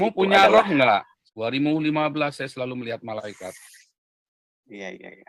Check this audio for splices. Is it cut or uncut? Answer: cut